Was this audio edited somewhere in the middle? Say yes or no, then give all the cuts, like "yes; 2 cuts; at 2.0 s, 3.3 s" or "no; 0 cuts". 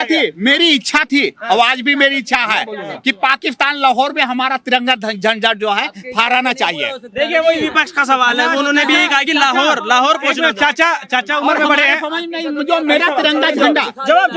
no; 0 cuts